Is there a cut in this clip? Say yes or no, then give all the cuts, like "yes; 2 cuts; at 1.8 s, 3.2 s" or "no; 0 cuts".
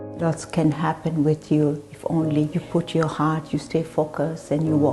yes; 1 cut; at 2.6 s